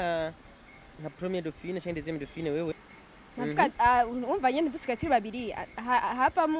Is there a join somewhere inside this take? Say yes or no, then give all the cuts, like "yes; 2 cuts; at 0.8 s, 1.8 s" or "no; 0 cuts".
yes; 1 cut; at 2.9 s